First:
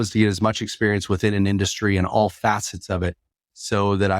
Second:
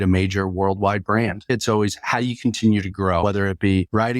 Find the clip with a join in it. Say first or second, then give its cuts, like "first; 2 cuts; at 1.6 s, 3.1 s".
second; 2 cuts; at 1.5 s, 3.2 s